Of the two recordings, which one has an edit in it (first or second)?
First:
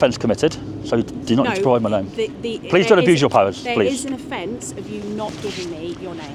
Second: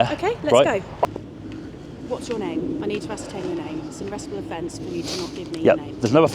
second